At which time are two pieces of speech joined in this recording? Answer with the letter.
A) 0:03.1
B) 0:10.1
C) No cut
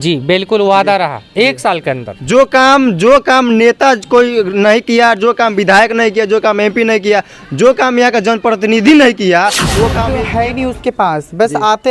B